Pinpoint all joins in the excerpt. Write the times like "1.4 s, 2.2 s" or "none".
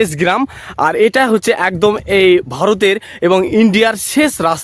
none